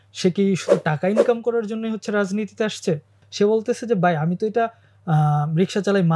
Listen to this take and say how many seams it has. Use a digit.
1